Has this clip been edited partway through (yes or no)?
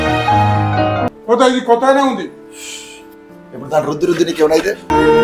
yes